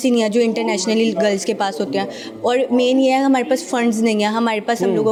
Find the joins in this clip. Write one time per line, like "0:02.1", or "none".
none